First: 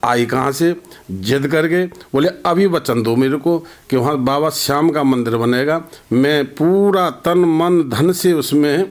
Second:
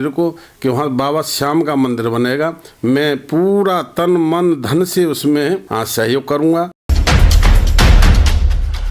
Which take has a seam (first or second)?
second